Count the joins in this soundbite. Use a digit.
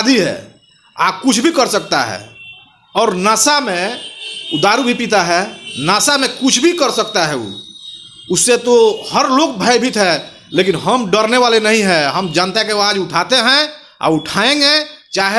0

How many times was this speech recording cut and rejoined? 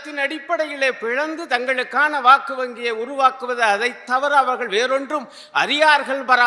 0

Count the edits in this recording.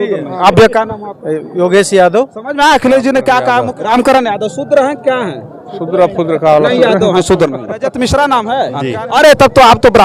2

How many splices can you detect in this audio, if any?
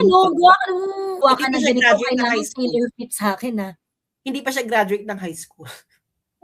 1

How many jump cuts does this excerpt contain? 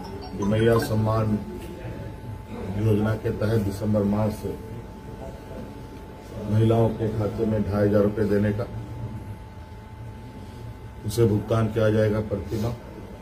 0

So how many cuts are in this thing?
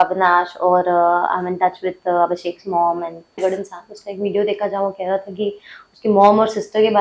1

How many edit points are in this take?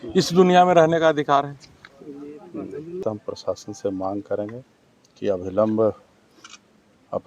1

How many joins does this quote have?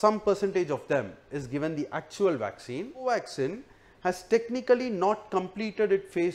1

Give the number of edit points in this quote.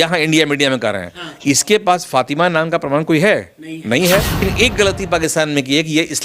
1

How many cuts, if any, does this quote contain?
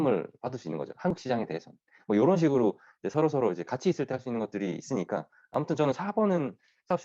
0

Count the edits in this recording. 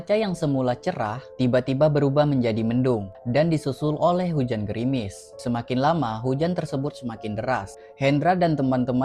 3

